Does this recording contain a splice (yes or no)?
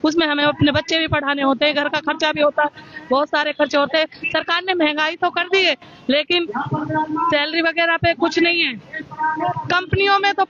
no